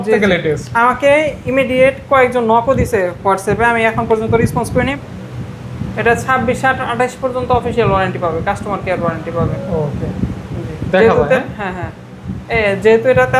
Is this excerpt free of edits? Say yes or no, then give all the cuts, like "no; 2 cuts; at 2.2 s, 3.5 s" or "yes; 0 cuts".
no; 1 cut; at 4.9 s